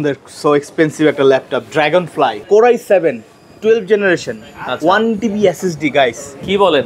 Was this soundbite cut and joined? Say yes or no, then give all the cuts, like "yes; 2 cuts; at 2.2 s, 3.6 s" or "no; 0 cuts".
yes; 1 cut; at 2.4 s